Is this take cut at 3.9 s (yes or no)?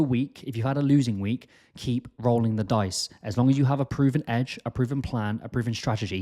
yes